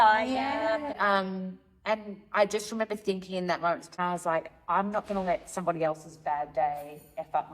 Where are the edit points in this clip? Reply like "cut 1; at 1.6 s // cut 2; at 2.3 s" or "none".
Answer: cut 1; at 1.0 s // cut 2; at 4.0 s